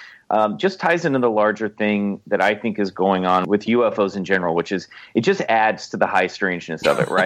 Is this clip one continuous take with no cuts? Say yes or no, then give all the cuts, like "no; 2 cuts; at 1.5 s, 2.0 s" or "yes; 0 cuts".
no; 1 cut; at 3.4 s